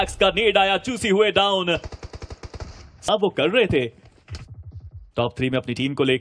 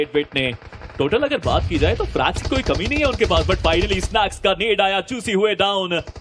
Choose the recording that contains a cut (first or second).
first